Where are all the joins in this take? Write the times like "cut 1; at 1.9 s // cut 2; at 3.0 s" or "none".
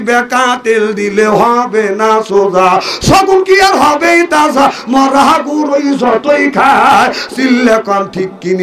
none